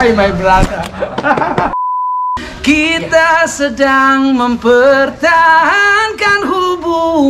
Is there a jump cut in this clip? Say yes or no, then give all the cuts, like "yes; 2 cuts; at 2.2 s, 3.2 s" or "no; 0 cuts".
yes; 1 cut; at 1.9 s